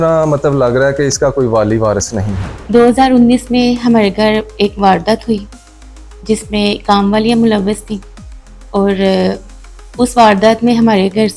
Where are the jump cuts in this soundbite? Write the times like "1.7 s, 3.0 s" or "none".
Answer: 2.4 s